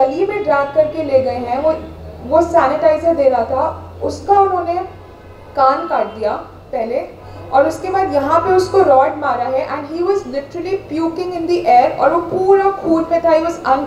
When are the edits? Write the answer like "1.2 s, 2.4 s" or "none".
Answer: none